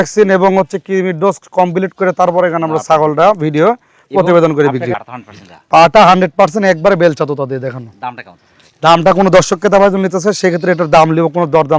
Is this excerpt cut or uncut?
uncut